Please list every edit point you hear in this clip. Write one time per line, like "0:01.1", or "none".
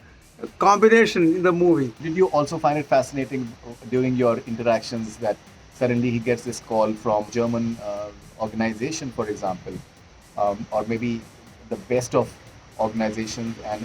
0:02.0
0:07.3